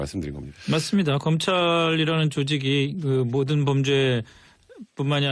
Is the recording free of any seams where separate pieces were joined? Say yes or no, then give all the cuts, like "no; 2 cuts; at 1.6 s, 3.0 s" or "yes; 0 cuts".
no; 1 cut; at 4.3 s